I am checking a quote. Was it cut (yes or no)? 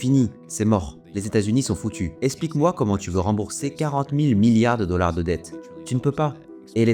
yes